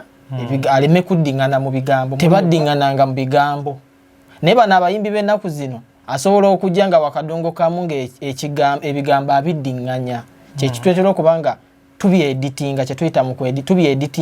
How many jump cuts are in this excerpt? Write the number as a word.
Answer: one